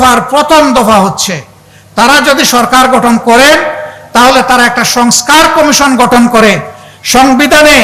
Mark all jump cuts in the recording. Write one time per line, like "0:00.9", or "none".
none